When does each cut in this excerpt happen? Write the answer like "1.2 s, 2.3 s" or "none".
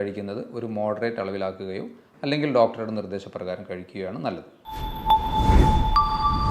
4.5 s